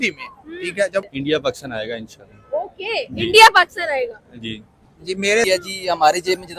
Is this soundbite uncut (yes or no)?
no